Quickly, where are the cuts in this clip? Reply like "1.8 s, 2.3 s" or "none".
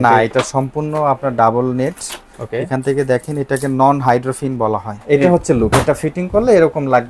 4.9 s